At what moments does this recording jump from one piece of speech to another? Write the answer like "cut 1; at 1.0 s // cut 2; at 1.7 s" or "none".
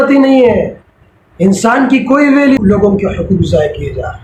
cut 1; at 2.6 s